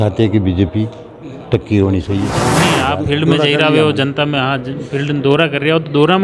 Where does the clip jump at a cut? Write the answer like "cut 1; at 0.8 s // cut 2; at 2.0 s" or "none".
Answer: cut 1; at 2.5 s